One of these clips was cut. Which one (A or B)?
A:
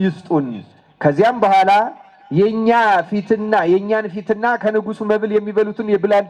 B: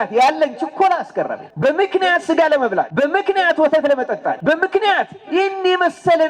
B